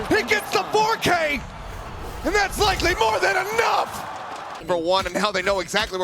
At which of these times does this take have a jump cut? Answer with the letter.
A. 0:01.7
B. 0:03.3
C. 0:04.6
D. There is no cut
C